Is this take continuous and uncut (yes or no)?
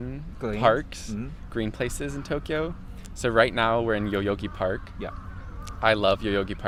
yes